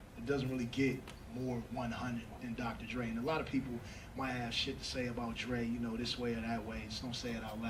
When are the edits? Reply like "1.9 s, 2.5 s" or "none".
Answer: none